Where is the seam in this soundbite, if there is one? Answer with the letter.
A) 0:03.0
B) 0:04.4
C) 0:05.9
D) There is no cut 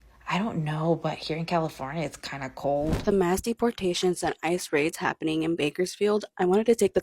A